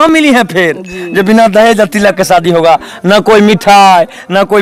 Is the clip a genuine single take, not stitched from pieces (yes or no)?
yes